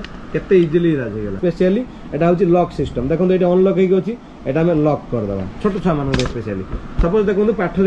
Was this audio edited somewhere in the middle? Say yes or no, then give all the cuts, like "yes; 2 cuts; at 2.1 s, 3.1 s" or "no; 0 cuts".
yes; 1 cut; at 1.4 s